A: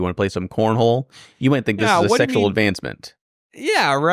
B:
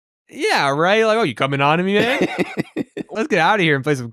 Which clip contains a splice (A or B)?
B